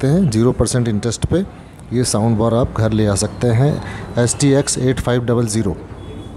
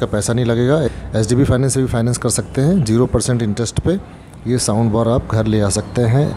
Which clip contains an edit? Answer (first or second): second